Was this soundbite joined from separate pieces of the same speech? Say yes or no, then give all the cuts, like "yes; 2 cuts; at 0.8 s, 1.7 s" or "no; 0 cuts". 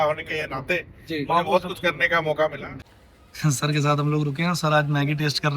yes; 1 cut; at 2.7 s